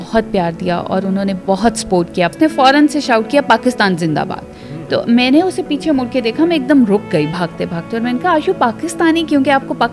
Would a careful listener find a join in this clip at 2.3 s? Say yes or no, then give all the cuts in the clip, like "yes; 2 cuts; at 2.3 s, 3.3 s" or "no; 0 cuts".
yes; 1 cut; at 2.3 s